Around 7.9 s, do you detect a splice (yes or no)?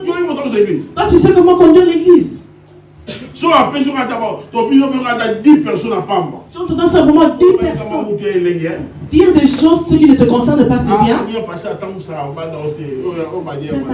yes